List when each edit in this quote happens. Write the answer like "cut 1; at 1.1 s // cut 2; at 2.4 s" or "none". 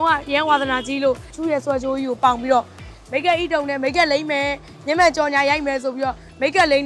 cut 1; at 1.3 s